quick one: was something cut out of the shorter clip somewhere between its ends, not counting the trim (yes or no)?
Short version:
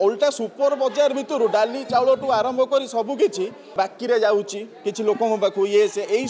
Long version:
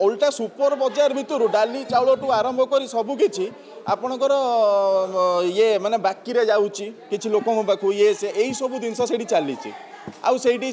yes